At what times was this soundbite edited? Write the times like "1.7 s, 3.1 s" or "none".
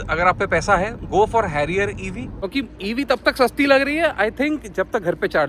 2.3 s